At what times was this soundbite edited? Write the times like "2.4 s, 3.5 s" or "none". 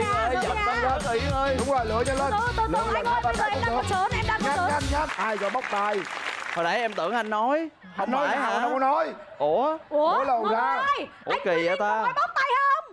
5.1 s